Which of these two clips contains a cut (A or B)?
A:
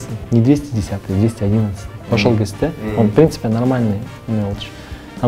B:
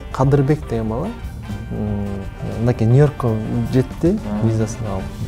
B